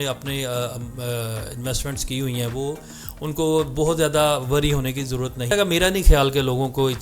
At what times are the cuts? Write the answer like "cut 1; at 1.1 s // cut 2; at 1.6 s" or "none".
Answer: cut 1; at 5.5 s